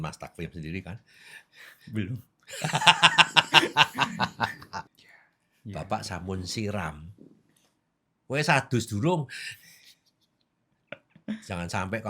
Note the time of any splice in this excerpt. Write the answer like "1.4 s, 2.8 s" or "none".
4.8 s